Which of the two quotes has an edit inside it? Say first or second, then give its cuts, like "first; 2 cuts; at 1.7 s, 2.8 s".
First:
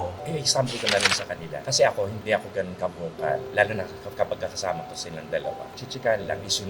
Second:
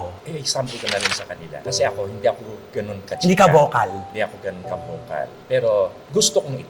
first; 3 cuts; at 2.2 s, 3.5 s, 5.7 s